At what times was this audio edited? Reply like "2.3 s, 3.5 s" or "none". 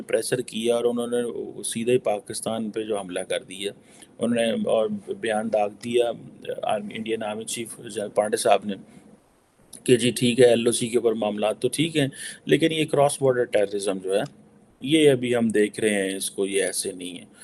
none